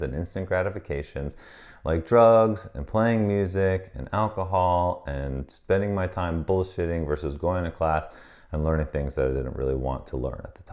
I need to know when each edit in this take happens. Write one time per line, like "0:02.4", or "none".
none